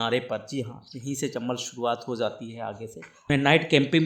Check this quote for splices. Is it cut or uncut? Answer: cut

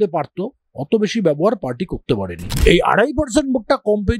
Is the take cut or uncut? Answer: cut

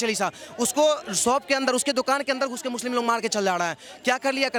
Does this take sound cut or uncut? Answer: uncut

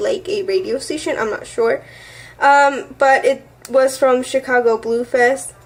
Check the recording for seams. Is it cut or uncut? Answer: uncut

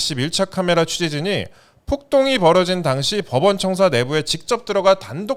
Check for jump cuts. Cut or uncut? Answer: uncut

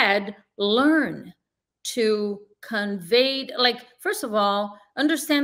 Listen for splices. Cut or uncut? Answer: uncut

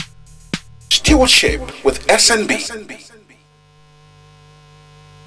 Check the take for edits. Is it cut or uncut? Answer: cut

